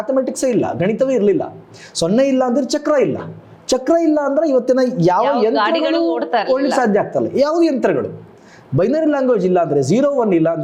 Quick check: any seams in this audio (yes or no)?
no